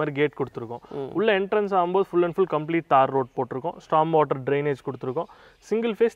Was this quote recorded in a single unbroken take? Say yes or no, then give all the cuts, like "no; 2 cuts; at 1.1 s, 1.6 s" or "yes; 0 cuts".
yes; 0 cuts